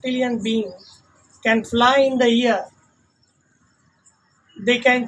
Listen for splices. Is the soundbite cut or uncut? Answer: uncut